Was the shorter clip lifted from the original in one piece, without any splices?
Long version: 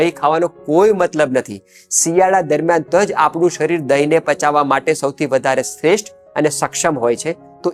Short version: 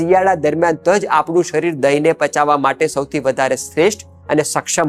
yes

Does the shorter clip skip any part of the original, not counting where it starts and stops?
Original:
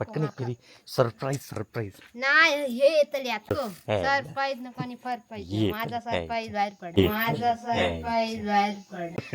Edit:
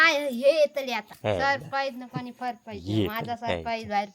yes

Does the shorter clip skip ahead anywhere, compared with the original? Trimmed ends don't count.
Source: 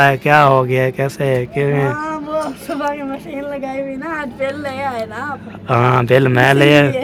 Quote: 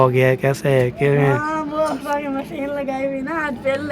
yes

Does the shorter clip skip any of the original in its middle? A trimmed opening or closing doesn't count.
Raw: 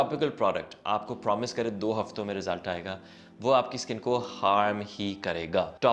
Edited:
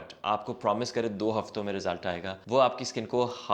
yes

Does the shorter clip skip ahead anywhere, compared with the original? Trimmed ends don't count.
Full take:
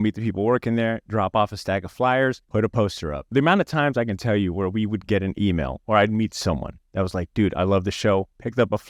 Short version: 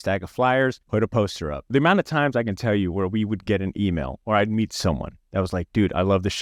no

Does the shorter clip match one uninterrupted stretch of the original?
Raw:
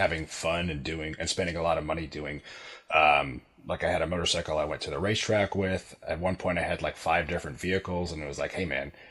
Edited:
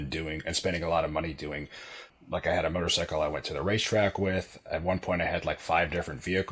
no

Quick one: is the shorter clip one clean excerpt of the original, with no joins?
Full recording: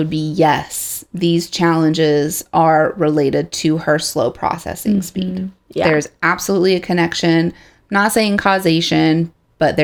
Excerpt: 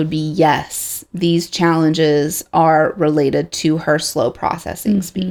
yes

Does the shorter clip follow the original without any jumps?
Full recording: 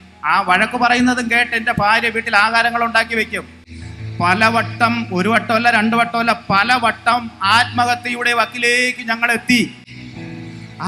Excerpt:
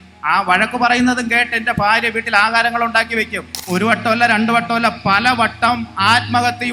no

